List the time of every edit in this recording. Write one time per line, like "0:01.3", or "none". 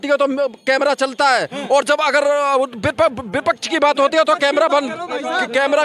none